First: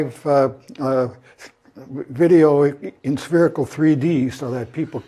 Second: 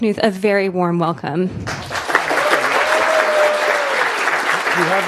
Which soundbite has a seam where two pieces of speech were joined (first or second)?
first